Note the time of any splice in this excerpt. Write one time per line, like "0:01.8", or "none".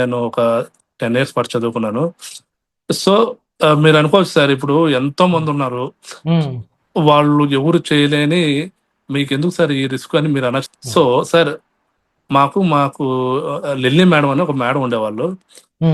0:10.7